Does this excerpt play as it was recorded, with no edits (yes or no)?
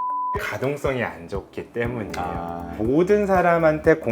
no